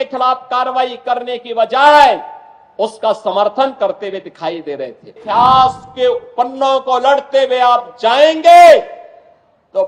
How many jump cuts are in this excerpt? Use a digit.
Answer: 1